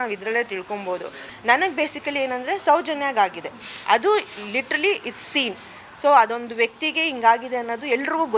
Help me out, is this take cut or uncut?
cut